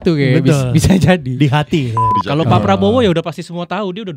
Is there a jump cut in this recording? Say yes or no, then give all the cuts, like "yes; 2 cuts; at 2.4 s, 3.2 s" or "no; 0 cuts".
yes; 1 cut; at 2.1 s